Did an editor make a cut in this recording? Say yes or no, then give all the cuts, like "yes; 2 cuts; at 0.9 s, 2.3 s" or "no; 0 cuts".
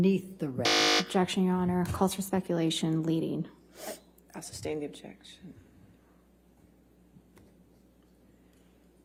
no; 0 cuts